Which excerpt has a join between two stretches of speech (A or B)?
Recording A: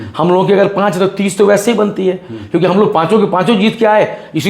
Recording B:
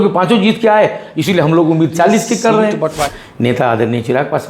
B